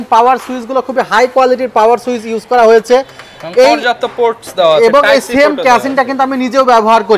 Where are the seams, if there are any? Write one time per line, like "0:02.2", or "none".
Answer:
none